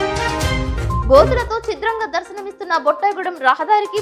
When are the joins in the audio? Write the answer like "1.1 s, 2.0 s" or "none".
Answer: 1.0 s